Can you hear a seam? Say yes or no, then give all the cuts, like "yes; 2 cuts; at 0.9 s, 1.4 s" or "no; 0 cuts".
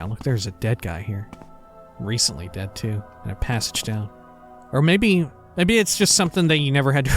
yes; 1 cut; at 5.4 s